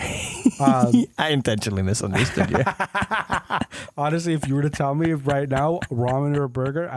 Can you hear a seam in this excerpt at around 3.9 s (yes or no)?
no